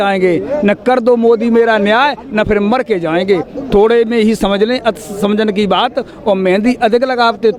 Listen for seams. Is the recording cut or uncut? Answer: uncut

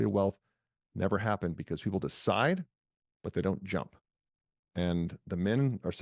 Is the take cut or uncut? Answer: uncut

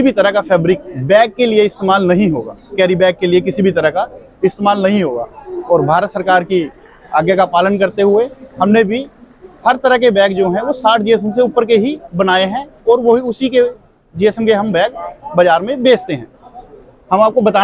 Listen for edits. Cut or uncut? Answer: uncut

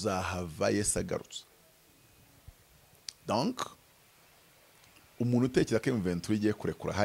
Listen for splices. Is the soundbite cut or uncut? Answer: uncut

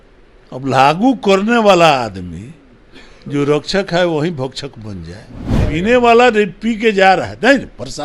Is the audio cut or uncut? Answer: cut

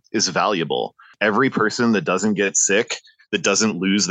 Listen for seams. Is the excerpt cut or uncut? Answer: cut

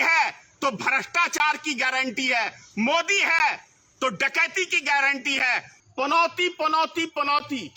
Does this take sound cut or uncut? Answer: cut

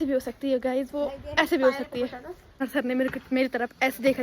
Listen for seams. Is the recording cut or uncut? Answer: cut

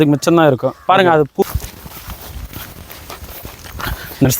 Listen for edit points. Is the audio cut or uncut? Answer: cut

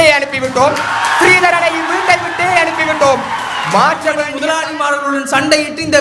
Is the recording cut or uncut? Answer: cut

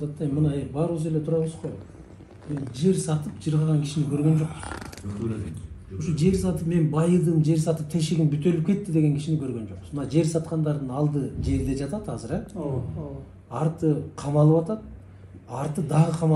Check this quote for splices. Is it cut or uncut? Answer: uncut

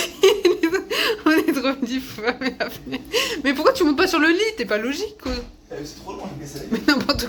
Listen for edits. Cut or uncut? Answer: uncut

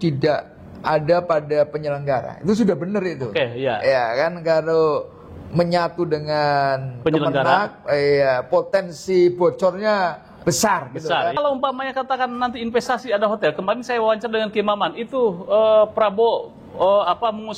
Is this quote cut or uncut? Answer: cut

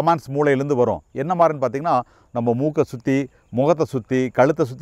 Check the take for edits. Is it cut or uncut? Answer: uncut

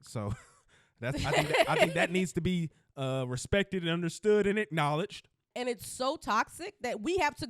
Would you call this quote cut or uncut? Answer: cut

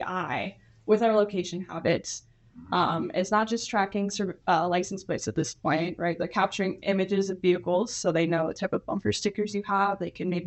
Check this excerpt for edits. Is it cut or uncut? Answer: uncut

